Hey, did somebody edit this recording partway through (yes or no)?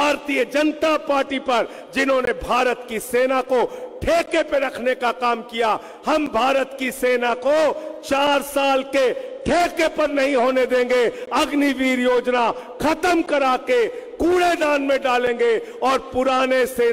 no